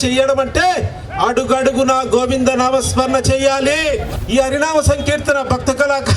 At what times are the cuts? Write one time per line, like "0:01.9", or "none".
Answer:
0:04.1